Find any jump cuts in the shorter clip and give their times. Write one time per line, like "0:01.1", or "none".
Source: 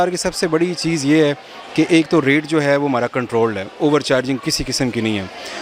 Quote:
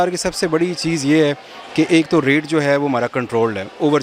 none